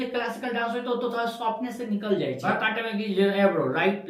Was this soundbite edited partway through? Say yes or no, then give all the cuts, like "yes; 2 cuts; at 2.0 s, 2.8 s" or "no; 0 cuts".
yes; 1 cut; at 2.4 s